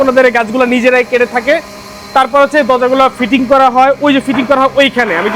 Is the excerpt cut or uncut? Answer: uncut